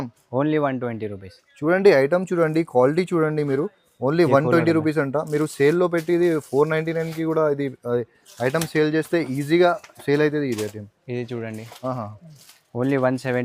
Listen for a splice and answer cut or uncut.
uncut